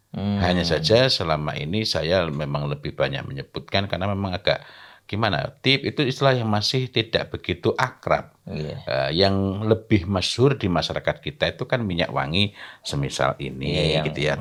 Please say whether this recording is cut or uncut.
uncut